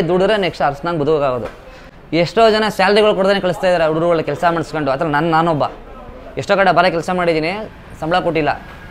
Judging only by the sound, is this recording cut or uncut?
uncut